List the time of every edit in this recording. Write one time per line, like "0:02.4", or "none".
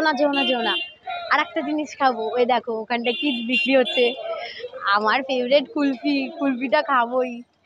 none